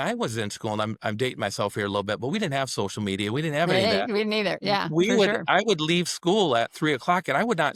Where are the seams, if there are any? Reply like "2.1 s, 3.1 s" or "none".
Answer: none